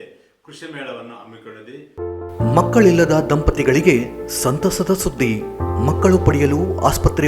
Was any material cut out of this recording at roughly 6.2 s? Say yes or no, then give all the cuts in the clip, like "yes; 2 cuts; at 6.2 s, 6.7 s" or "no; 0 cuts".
no; 1 cut; at 1.9 s